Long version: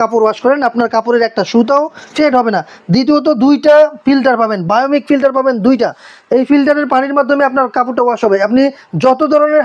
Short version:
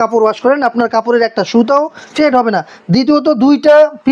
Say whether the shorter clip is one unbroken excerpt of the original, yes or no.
yes